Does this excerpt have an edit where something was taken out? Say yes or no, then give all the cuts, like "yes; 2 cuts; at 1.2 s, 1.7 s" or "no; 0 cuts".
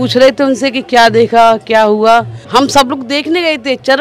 yes; 1 cut; at 2.4 s